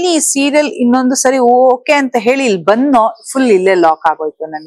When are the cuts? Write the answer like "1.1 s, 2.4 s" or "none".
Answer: none